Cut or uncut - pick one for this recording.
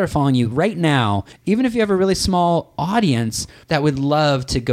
cut